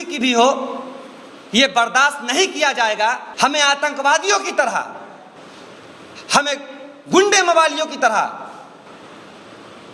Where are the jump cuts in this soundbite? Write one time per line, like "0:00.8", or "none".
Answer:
0:03.3